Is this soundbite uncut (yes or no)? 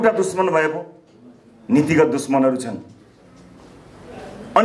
yes